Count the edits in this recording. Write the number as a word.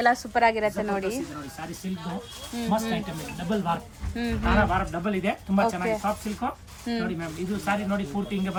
zero